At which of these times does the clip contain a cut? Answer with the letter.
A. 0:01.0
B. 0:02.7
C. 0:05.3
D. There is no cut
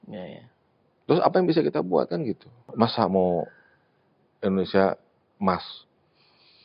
B